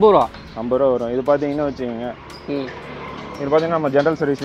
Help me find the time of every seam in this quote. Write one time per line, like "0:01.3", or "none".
none